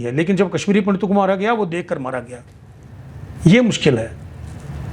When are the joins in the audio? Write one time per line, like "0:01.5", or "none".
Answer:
none